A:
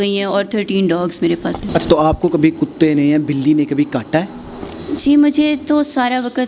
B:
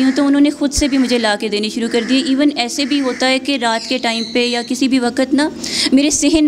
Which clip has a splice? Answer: A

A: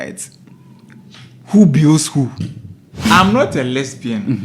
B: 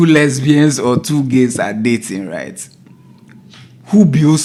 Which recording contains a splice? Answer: A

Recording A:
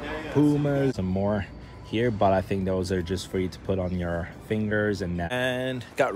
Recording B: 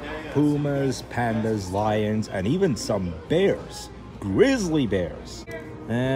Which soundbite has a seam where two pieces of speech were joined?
A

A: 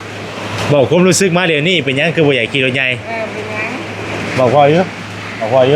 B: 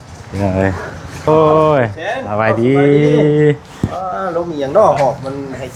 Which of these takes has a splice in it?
B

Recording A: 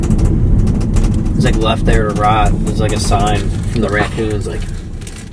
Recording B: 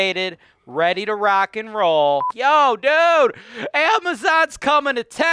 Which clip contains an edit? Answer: B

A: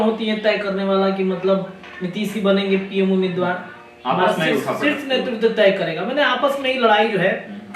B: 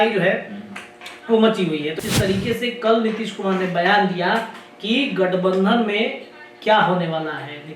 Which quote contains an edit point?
B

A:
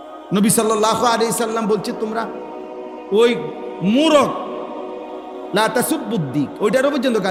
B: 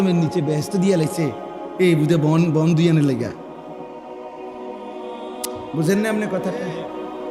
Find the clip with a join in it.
B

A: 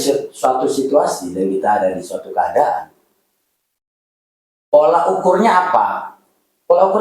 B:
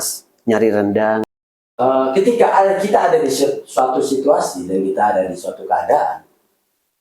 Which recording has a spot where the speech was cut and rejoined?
B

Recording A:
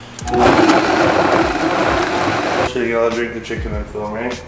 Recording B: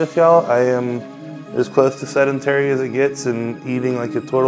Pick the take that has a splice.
A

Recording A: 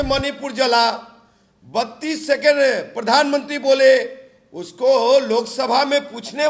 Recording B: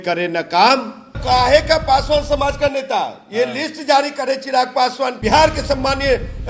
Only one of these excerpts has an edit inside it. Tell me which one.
B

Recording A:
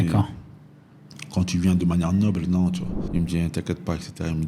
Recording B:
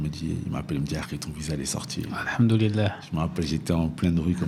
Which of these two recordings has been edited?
A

